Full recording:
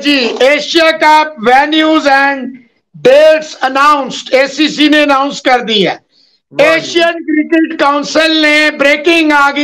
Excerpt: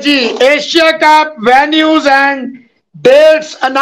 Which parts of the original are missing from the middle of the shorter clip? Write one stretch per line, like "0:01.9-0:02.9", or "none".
none